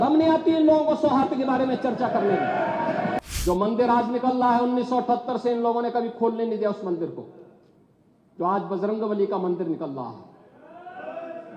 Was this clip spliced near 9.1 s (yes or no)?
no